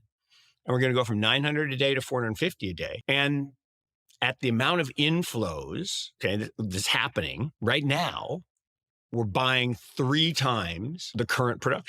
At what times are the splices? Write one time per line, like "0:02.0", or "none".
0:03.0
0:06.0
0:07.5
0:11.0